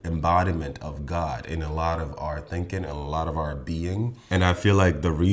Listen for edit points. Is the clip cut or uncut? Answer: uncut